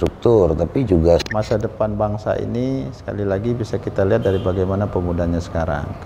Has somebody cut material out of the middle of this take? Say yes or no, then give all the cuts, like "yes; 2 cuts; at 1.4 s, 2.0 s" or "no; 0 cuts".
yes; 1 cut; at 1.2 s